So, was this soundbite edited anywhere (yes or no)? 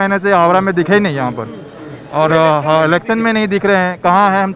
no